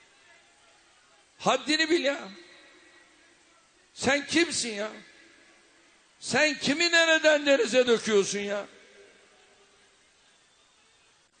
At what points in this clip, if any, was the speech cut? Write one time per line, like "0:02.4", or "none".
0:07.2